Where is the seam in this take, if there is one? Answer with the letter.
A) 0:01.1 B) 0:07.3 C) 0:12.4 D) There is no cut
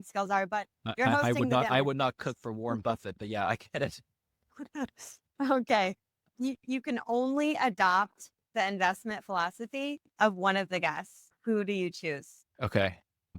C